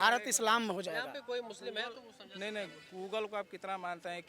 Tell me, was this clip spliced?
no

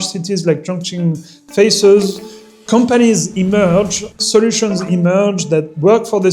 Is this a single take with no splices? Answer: no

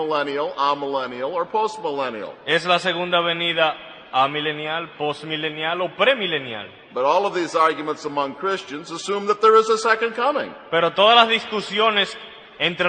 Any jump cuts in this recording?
yes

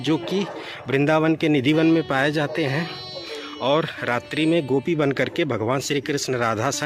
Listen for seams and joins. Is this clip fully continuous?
yes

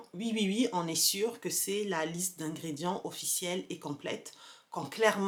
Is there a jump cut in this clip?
no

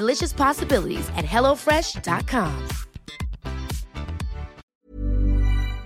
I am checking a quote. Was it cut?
yes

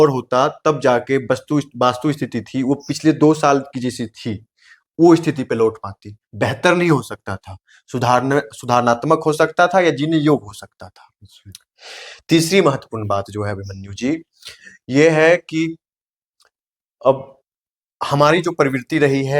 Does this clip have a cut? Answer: no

